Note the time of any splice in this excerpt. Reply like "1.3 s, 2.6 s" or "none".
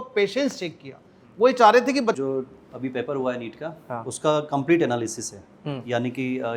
2.2 s